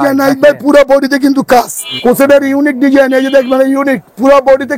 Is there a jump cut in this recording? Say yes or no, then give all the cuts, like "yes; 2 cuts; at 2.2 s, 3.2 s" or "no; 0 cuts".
yes; 1 cut; at 1.8 s